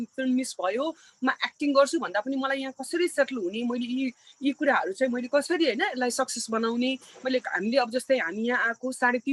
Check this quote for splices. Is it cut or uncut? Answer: uncut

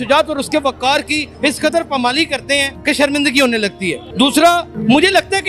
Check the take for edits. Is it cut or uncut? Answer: uncut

